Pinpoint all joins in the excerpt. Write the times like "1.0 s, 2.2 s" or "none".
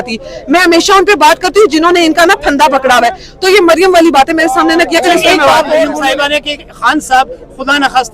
6.0 s

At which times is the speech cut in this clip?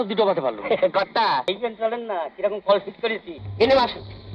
1.5 s

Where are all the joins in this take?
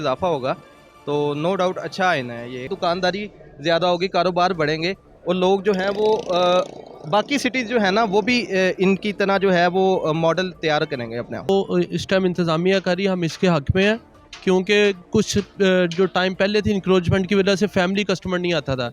2.7 s, 11.5 s

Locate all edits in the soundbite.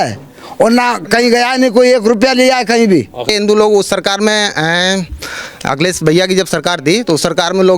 3.3 s

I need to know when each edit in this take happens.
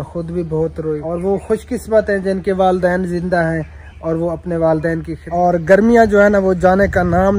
1.0 s, 5.2 s

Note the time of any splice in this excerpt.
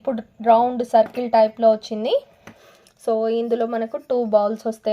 2.7 s

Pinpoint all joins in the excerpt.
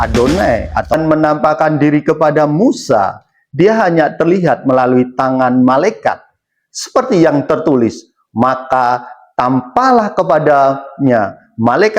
0.9 s

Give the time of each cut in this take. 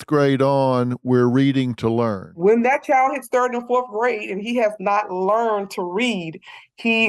2.3 s

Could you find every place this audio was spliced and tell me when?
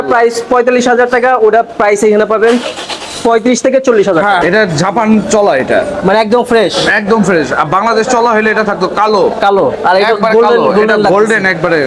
4.4 s

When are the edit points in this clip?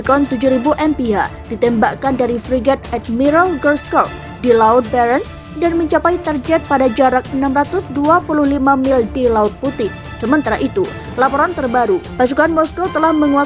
none

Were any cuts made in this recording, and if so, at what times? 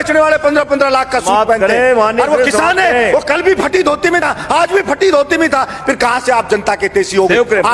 none

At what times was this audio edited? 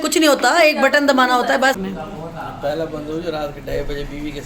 1.8 s

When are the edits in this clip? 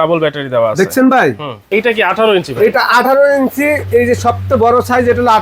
1.6 s

